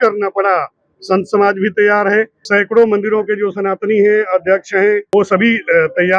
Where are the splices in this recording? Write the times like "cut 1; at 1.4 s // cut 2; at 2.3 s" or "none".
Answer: cut 1; at 2.4 s // cut 2; at 5.0 s